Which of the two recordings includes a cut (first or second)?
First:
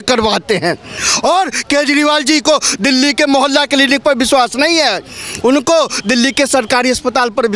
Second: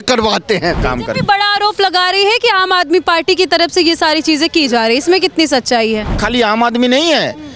second